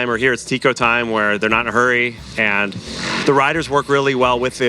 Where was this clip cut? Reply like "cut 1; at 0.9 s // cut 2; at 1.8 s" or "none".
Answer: cut 1; at 3.2 s